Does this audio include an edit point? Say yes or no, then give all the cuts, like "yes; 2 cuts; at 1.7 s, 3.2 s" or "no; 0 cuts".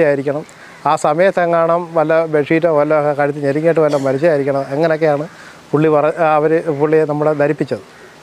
no; 0 cuts